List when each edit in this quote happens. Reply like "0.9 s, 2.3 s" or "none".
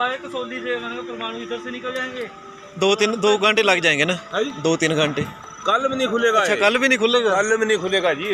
none